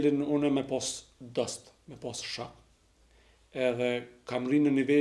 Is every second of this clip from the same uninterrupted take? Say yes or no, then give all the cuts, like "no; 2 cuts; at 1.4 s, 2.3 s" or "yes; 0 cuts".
yes; 0 cuts